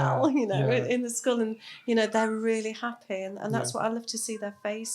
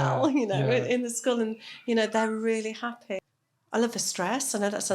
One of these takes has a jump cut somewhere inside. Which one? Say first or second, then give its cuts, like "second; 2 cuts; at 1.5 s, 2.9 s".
second; 1 cut; at 3.3 s